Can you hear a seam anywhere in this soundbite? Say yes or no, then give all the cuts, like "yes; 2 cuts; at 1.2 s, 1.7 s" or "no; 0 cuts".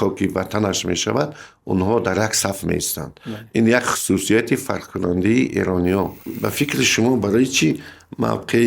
yes; 1 cut; at 6.3 s